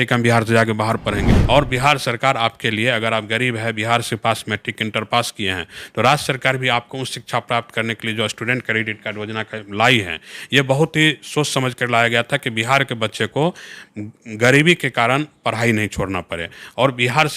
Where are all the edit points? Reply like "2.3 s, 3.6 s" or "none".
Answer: 1.3 s